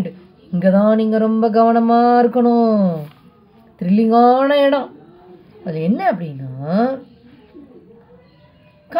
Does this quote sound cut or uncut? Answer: uncut